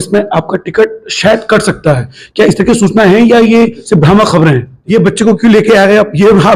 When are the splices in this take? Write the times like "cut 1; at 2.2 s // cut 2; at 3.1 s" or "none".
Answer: cut 1; at 4.8 s